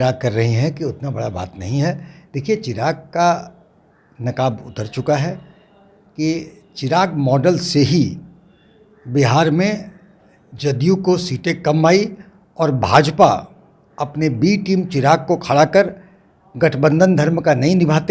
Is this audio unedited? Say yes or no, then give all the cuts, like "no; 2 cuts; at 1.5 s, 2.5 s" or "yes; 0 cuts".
yes; 0 cuts